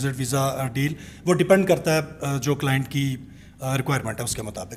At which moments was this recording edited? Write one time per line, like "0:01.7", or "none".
none